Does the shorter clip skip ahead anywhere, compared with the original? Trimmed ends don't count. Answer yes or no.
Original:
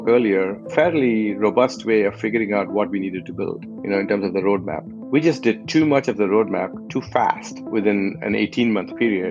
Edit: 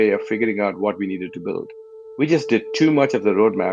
yes